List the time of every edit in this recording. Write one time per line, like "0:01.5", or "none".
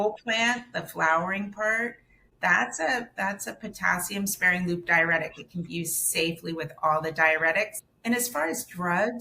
0:07.8